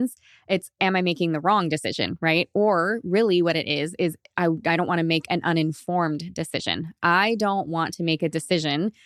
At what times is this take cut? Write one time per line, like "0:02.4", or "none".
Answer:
none